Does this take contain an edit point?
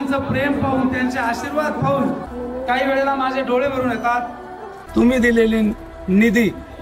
yes; 2 cuts; at 2.3 s, 4.8 s

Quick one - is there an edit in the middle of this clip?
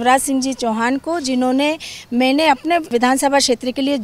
yes; 1 cut; at 2.9 s

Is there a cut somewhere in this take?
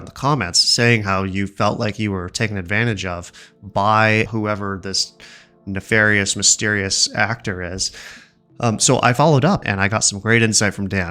yes; 2 cuts; at 4.3 s, 9.6 s

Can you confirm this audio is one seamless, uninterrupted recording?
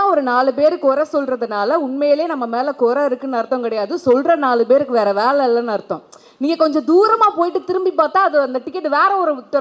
yes; 0 cuts

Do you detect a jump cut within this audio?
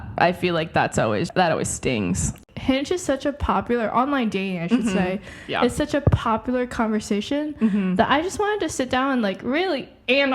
yes; 2 cuts; at 1.3 s, 2.4 s

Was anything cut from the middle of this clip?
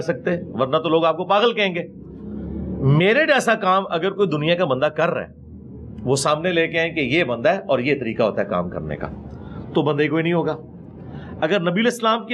no; 0 cuts

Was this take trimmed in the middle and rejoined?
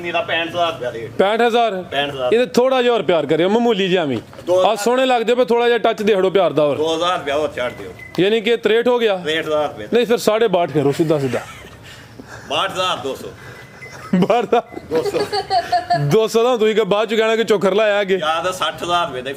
no; 0 cuts

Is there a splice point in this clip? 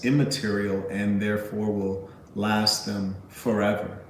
no; 0 cuts

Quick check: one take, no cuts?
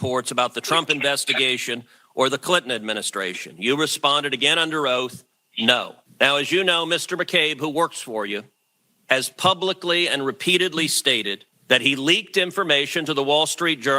no; 1 cut; at 6.0 s

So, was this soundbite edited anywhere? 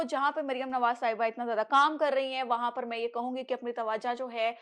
no; 0 cuts

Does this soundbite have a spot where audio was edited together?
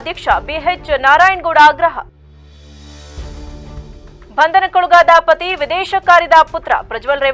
no; 0 cuts

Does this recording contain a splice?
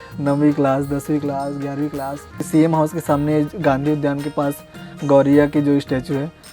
yes; 1 cut; at 2.5 s

